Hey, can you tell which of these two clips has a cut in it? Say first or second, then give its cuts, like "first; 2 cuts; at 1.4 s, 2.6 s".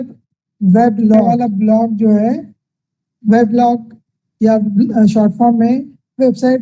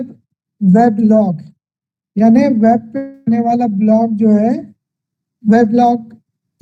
first; 1 cut; at 1.3 s